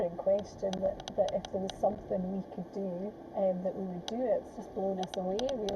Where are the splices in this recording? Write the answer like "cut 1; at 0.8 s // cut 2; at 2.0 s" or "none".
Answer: cut 1; at 1.0 s // cut 2; at 3.2 s // cut 3; at 4.4 s